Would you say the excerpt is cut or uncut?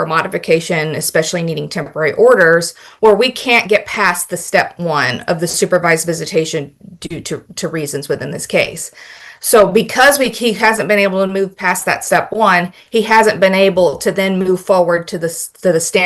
uncut